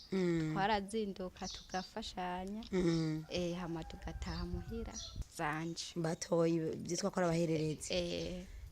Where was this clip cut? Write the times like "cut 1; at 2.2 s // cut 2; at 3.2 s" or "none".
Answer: cut 1; at 5.2 s